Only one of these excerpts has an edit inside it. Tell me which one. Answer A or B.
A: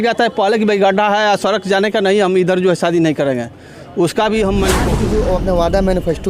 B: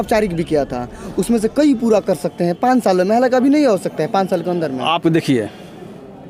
A